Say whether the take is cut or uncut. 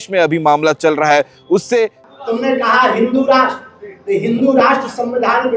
cut